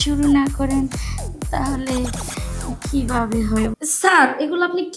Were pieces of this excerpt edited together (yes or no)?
yes